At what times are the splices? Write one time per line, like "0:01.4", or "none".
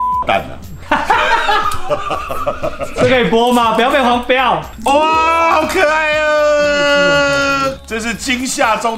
none

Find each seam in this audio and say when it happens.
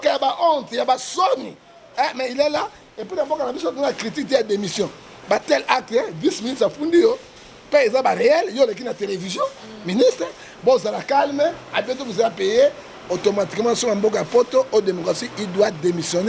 none

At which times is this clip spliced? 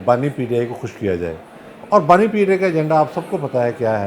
none

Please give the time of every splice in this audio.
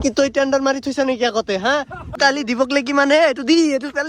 0:02.1

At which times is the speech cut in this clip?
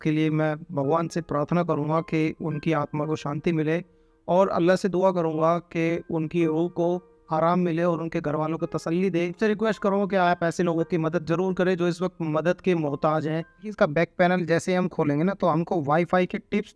0:13.7

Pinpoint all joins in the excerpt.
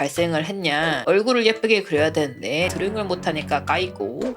0:01.0

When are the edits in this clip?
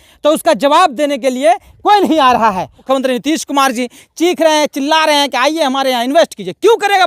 0:02.8

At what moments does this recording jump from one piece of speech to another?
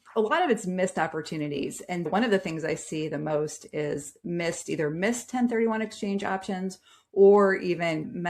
none

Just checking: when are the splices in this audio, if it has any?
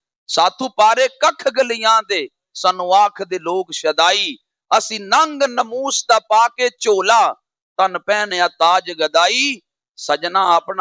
none

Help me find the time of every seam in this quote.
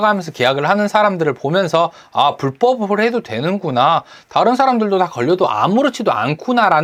none

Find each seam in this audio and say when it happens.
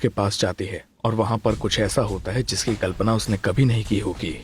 none

